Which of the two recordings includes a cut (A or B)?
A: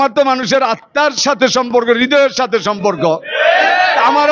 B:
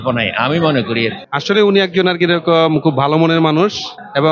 B